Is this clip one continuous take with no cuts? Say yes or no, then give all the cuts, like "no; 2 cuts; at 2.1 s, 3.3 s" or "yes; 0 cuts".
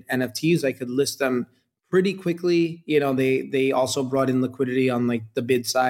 yes; 0 cuts